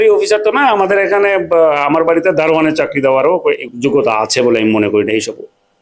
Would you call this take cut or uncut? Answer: cut